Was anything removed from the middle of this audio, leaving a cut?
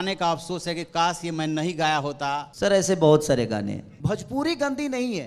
yes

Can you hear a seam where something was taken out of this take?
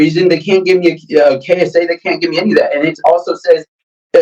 no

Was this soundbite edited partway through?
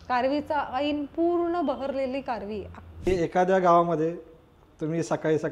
yes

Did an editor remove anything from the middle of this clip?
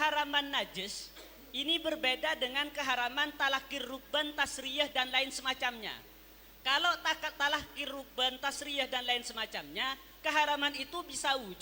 no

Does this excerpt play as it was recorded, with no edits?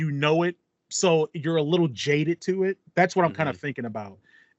yes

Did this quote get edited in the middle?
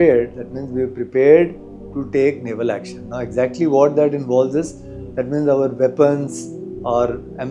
no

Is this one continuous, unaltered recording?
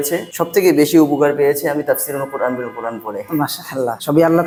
yes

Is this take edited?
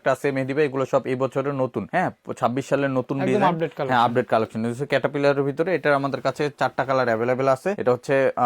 no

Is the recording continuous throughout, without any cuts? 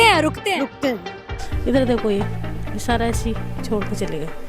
no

